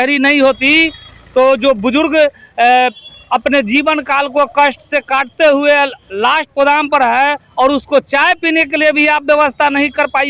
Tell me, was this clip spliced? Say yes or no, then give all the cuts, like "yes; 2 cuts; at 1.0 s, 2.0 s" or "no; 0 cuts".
no; 0 cuts